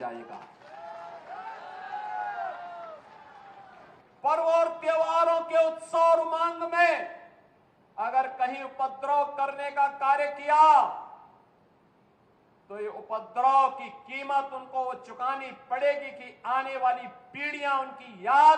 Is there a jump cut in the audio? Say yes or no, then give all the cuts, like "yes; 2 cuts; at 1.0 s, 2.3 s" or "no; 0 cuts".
no; 0 cuts